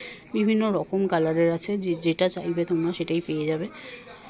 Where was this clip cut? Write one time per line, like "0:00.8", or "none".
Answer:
none